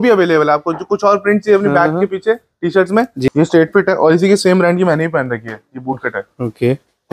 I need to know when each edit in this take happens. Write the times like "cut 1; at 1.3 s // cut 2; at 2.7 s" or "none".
cut 1; at 3.3 s